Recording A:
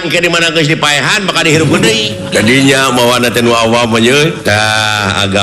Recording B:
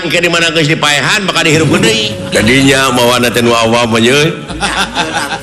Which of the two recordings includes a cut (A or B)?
A